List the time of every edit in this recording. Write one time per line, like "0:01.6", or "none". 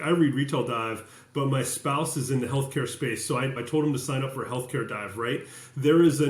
0:03.6